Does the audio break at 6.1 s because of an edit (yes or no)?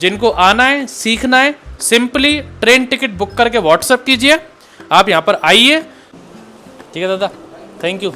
yes